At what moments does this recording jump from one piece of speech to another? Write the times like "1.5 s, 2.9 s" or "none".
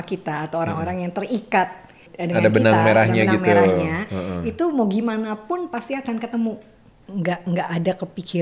2.1 s, 7.0 s